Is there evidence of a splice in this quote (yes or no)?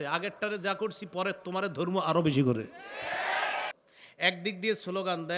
yes